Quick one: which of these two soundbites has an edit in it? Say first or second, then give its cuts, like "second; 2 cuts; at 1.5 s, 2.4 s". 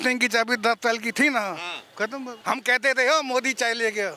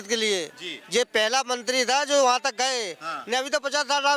first; 1 cut; at 2.3 s